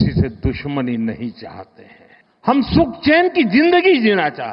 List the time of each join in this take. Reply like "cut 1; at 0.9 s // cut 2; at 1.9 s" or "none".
none